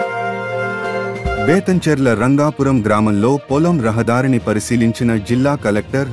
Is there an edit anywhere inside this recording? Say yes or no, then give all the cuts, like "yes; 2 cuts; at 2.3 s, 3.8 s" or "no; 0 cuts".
yes; 1 cut; at 1.3 s